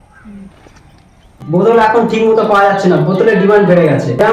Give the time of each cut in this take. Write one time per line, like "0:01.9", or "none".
0:01.3